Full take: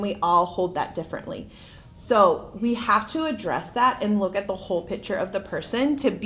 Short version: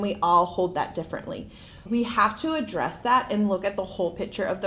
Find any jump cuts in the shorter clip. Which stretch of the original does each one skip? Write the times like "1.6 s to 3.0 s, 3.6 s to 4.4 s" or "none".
1.8 s to 2.5 s